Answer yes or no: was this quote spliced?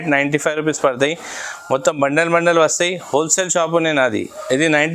no